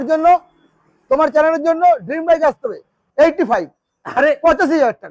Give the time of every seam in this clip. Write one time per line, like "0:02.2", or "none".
0:02.9